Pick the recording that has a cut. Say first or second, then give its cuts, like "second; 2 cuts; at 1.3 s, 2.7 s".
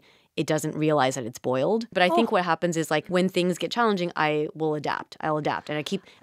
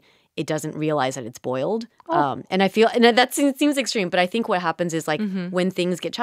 first; 2 cuts; at 1.9 s, 3.1 s